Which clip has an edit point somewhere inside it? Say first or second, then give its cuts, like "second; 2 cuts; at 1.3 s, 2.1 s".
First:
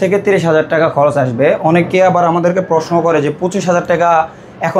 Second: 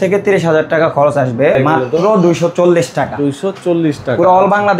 second; 1 cut; at 1.6 s